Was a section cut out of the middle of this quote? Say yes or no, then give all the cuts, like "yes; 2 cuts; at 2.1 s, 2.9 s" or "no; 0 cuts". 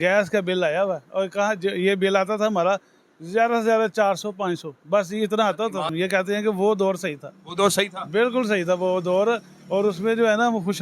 yes; 1 cut; at 5.9 s